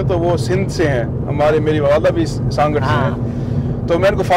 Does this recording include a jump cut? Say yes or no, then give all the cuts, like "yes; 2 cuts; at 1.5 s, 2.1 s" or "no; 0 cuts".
no; 0 cuts